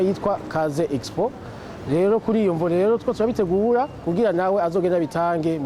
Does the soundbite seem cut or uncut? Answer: uncut